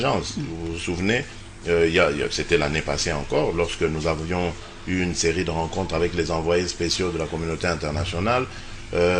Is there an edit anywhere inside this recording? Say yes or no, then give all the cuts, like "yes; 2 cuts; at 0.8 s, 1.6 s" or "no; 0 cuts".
yes; 1 cut; at 5.4 s